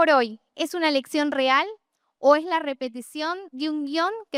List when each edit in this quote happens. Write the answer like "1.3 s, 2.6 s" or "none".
none